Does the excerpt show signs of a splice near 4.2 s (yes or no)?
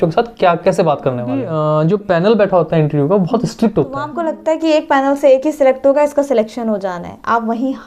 yes